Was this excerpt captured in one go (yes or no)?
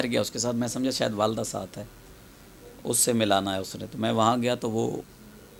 yes